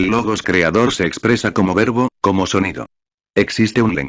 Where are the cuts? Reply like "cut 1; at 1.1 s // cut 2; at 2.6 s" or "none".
cut 1; at 1.8 s

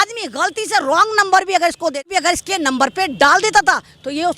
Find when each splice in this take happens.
cut 1; at 2.1 s

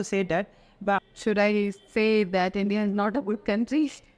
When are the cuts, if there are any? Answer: cut 1; at 1.0 s

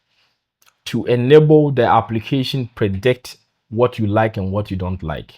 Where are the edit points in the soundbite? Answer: none

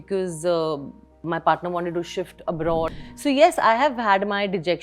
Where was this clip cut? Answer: cut 1; at 3.0 s

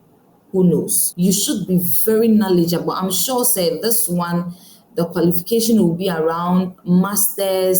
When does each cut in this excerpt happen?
cut 1; at 1.0 s

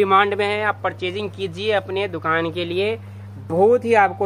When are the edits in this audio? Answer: none

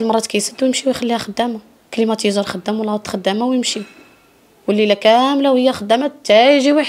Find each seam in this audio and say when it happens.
none

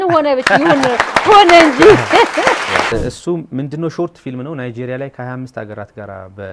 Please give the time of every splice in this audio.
cut 1; at 2.9 s

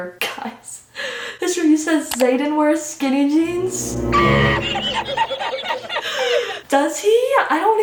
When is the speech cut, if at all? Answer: none

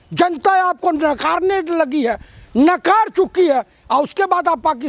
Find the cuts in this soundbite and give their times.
none

